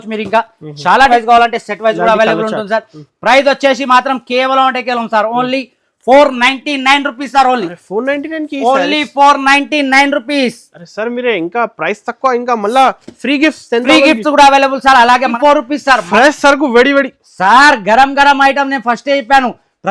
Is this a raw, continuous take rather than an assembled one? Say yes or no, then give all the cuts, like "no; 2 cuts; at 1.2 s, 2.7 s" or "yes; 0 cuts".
no; 2 cuts; at 1.1 s, 15.3 s